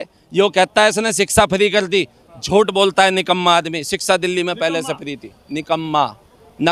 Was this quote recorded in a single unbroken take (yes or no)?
yes